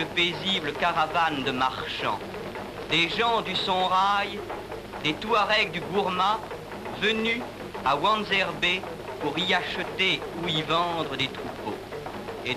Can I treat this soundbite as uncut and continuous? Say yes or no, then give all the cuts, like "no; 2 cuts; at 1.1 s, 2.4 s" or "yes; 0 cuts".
yes; 0 cuts